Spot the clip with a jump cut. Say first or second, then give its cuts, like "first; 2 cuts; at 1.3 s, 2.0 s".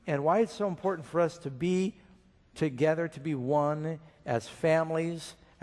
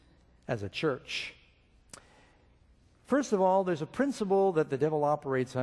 second; 1 cut; at 3.0 s